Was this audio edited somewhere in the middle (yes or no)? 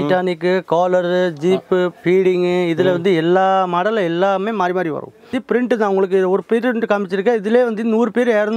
yes